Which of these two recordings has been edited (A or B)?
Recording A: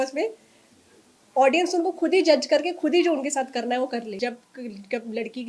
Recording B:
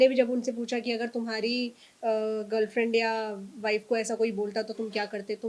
A